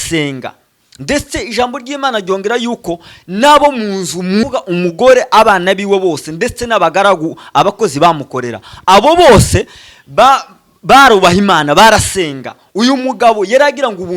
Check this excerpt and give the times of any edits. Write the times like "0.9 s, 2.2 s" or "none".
4.4 s